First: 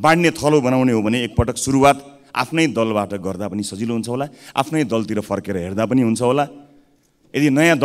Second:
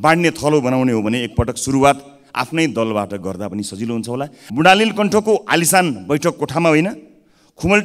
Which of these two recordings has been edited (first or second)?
second